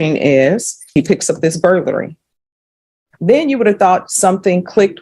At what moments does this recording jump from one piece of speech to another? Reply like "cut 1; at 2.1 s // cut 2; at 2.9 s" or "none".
cut 1; at 0.9 s

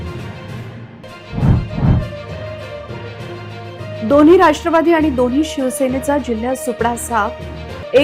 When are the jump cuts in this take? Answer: cut 1; at 0.9 s

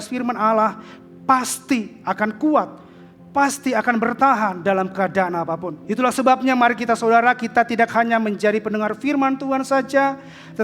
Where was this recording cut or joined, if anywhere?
cut 1; at 5.7 s

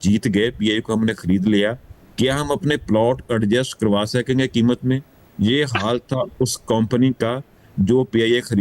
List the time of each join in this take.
none

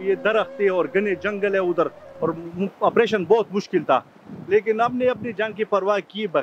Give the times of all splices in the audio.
none

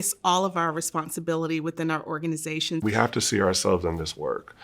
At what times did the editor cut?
cut 1; at 2.8 s

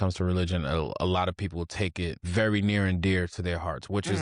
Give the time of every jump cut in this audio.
cut 1; at 2.2 s

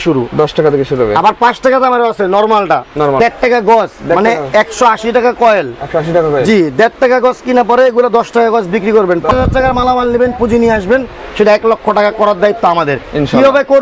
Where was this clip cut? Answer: cut 1; at 3.2 s // cut 2; at 9.3 s

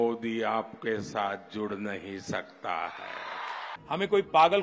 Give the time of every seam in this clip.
cut 1; at 3.7 s

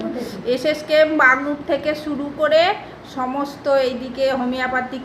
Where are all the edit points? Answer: cut 1; at 2.2 s

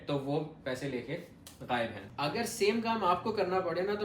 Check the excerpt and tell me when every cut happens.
cut 1; at 2.0 s

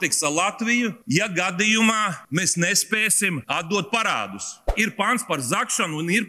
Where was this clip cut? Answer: cut 1; at 1.0 s // cut 2; at 2.2 s // cut 3; at 3.4 s // cut 4; at 4.7 s

